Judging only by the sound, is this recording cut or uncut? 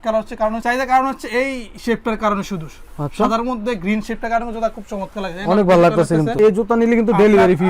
cut